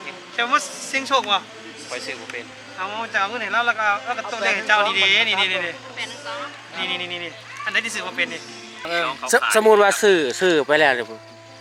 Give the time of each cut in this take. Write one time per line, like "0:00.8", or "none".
0:08.9